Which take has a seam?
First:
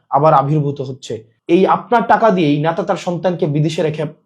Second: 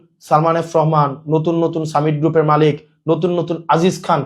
first; 1 cut; at 1.3 s

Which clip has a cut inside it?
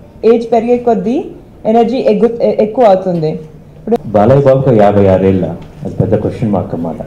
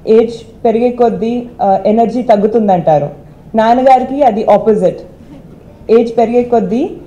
first; 1 cut; at 4.0 s

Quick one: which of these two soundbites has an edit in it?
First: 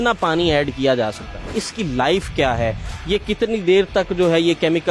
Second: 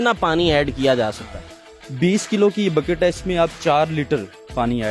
first; 1 cut; at 1.6 s

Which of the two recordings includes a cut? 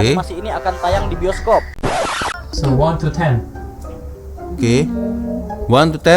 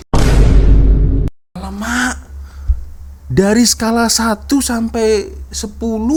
first; 1 cut; at 2.3 s

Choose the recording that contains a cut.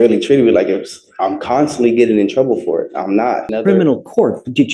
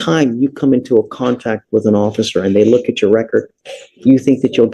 first; 1 cut; at 3.5 s

